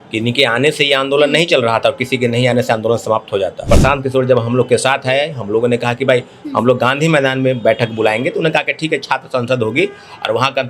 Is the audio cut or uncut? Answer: cut